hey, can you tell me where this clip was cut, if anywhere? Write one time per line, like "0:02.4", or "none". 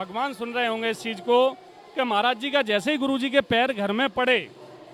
none